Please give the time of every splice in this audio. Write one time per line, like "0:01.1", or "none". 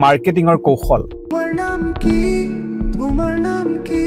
none